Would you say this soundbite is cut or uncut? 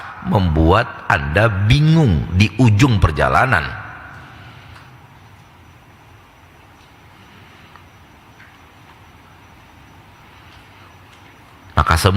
uncut